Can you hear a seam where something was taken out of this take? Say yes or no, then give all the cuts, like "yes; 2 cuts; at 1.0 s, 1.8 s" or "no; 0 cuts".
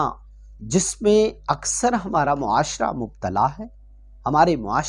no; 0 cuts